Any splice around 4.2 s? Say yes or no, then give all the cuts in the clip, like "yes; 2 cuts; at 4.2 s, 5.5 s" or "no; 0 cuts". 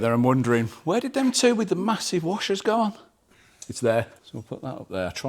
yes; 1 cut; at 4.2 s